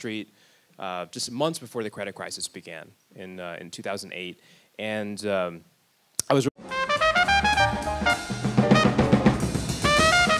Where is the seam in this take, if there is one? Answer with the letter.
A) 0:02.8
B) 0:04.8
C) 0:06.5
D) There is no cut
D